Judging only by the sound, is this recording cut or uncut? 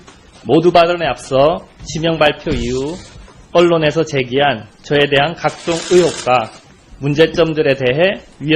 cut